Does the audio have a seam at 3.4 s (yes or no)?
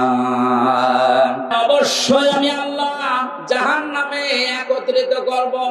no